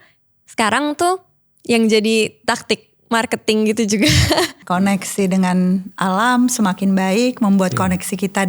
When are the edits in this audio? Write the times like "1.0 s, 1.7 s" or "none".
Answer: 4.6 s